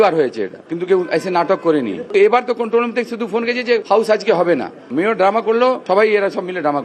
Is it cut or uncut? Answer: cut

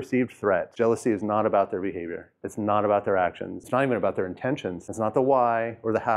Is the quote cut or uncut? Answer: cut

